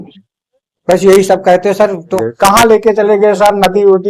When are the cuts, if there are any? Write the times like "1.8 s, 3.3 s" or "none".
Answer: 2.1 s